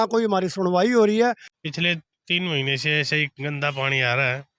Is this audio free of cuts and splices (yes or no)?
no